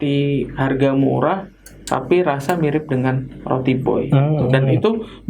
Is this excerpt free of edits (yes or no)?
yes